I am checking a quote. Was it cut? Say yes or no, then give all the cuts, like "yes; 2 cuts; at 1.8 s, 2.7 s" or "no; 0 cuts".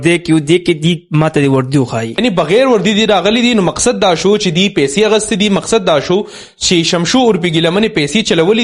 yes; 1 cut; at 2.2 s